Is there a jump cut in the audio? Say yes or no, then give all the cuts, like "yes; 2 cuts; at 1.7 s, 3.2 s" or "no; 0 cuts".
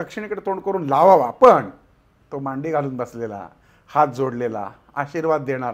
no; 0 cuts